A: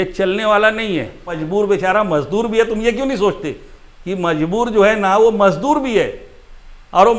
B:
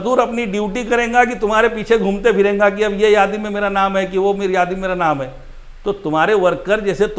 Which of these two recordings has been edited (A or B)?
A